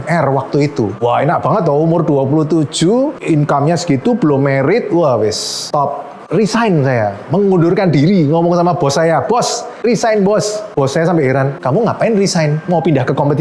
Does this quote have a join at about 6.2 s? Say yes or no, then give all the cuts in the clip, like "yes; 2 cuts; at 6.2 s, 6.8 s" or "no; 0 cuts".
yes; 1 cut; at 6.2 s